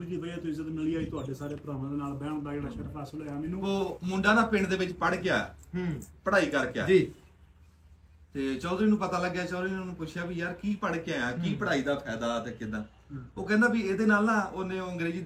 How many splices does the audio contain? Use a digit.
1